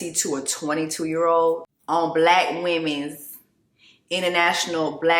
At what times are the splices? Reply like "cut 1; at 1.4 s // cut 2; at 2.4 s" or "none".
none